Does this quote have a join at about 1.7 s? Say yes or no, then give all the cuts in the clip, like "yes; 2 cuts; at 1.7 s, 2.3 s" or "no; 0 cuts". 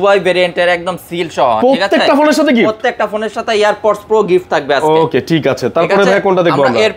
no; 0 cuts